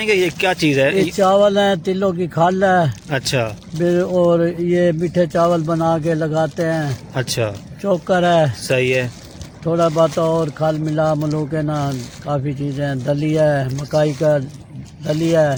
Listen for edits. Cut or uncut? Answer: uncut